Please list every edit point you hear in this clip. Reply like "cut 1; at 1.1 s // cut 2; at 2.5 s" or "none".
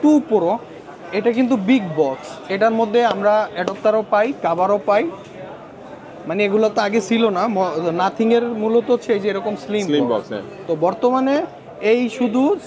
none